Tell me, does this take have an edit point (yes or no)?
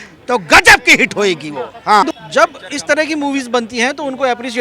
yes